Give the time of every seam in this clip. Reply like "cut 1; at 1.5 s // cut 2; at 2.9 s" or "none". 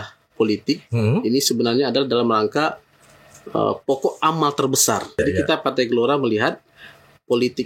cut 1; at 5.2 s